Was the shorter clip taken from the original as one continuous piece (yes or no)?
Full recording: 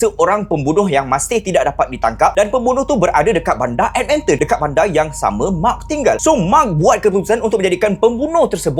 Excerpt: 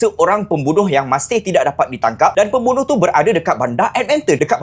yes